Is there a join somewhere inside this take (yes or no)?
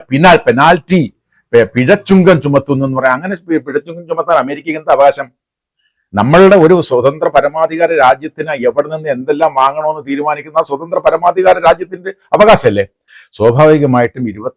yes